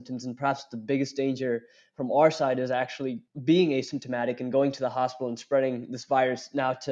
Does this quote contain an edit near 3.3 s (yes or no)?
yes